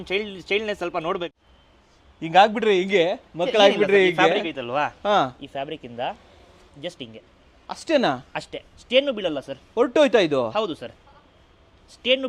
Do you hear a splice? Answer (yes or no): no